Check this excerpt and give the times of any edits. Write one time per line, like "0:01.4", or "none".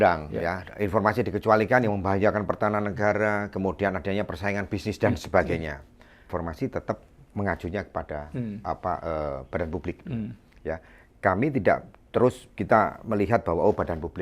0:06.3